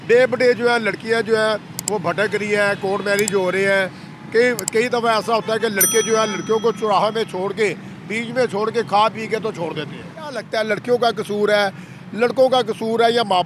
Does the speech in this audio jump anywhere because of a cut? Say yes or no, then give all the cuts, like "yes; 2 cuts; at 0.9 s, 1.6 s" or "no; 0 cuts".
yes; 1 cut; at 10.4 s